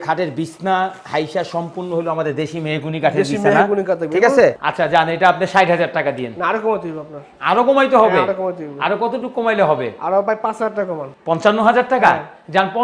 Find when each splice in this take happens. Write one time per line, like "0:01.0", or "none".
0:04.6